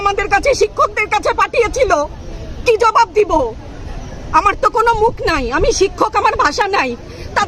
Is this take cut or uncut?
uncut